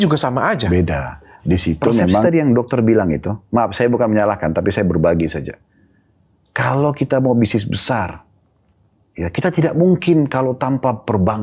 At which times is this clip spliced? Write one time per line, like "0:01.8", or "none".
0:02.2